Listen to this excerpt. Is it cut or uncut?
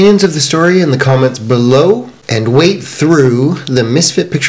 cut